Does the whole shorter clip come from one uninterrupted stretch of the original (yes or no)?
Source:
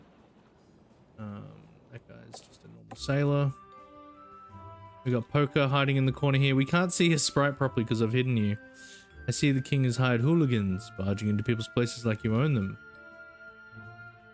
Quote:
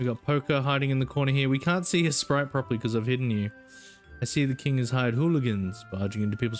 yes